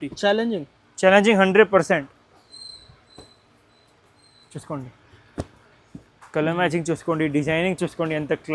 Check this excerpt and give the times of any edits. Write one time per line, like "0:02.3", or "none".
none